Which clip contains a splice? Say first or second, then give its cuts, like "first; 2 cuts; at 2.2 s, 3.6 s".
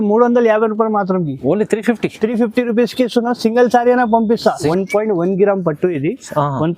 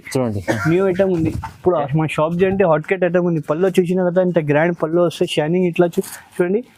first; 1 cut; at 4.7 s